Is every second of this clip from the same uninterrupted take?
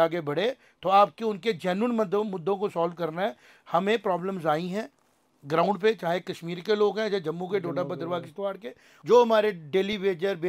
no; 1 cut; at 8.9 s

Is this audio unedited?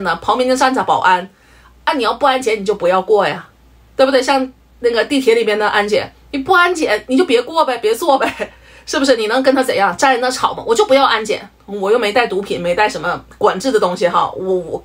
yes; 0 cuts

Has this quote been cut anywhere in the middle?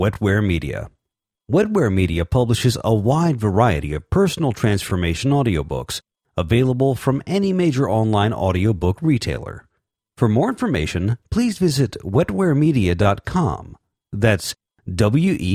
no; 0 cuts

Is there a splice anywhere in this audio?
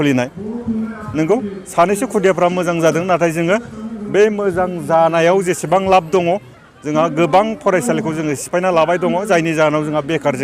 no; 0 cuts

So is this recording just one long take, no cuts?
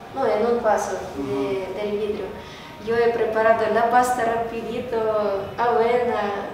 yes; 0 cuts

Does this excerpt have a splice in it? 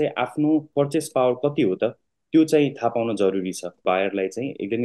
yes; 1 cut; at 3.8 s

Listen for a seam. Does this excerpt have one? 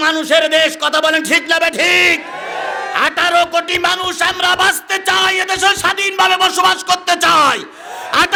no; 0 cuts

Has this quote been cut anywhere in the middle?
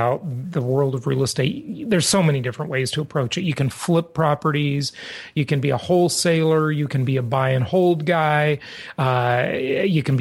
no; 0 cuts

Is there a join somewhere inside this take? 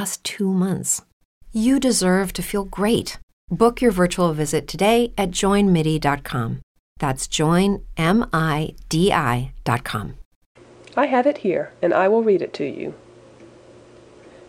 no; 0 cuts

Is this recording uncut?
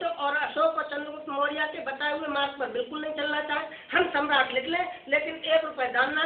yes; 0 cuts

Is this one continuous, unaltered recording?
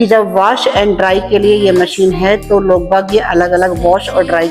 yes; 0 cuts

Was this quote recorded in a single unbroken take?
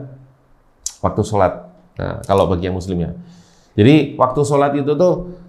yes; 0 cuts

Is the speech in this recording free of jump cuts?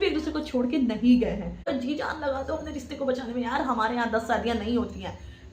no; 1 cut; at 1.7 s

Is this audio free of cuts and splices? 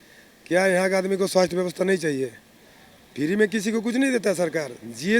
yes; 0 cuts

